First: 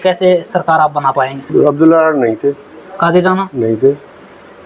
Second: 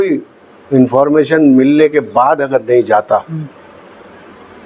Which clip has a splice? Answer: first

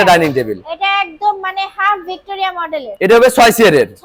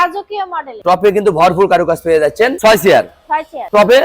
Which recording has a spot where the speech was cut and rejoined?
second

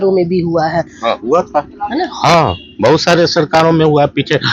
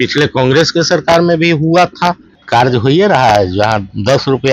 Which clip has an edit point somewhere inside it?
second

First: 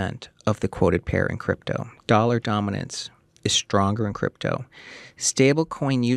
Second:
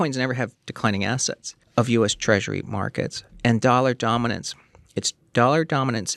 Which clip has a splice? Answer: second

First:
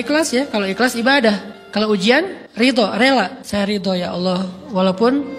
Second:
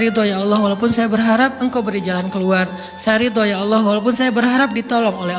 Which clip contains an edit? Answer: first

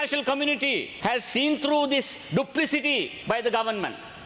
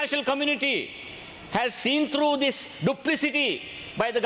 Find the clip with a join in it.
first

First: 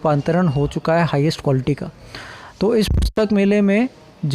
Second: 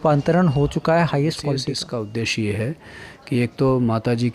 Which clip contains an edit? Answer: second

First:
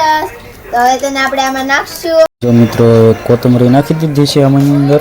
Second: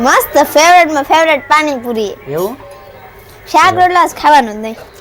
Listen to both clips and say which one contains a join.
first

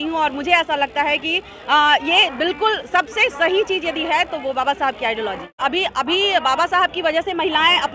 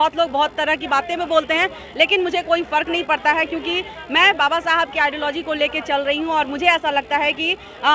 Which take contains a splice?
first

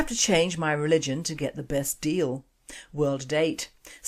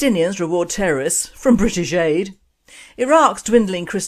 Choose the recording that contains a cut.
second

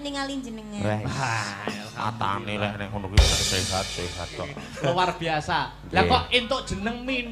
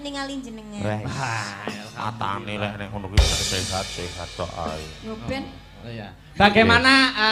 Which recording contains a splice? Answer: first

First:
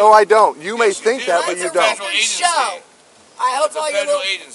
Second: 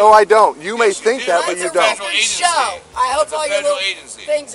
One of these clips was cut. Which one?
second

